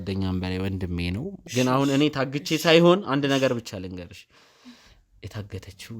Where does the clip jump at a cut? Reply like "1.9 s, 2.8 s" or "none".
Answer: 1.4 s